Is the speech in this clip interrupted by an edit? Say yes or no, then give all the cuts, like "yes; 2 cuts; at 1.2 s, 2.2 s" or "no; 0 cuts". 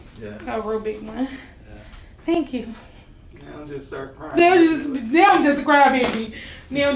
no; 0 cuts